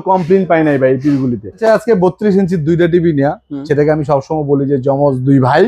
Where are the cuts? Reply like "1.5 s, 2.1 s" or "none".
1.6 s